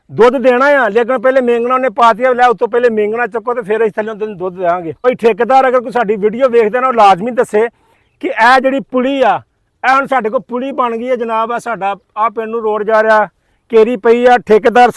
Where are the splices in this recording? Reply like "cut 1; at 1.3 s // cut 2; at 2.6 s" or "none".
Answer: cut 1; at 5.1 s

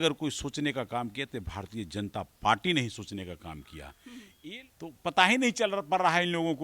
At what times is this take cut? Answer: cut 1; at 4.5 s

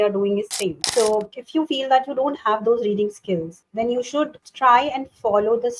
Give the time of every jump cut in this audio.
cut 1; at 0.8 s // cut 2; at 1.4 s // cut 3; at 3.6 s // cut 4; at 4.4 s

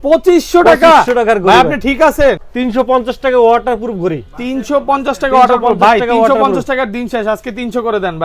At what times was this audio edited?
cut 1; at 2.5 s

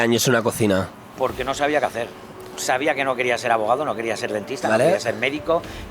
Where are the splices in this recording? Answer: cut 1; at 2.5 s

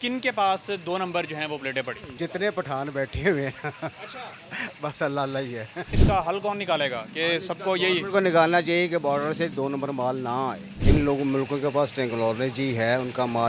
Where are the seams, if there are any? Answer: cut 1; at 2.1 s // cut 2; at 6.1 s // cut 3; at 10.7 s

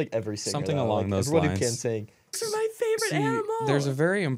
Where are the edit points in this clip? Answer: cut 1; at 2.4 s

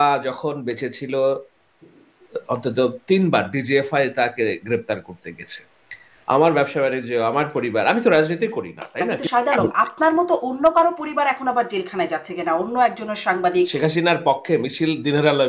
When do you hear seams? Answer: cut 1; at 9.1 s // cut 2; at 13.7 s

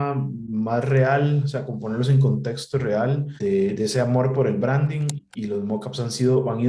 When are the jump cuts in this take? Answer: cut 1; at 3.3 s // cut 2; at 5.2 s

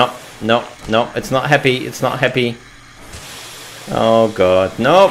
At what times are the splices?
none

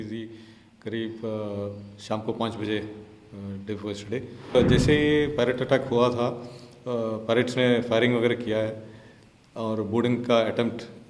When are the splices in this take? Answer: cut 1; at 4.5 s

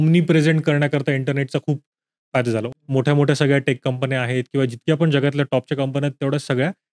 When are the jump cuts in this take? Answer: cut 1; at 2.7 s

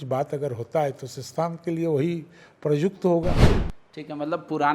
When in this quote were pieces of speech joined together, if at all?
cut 1; at 3.4 s

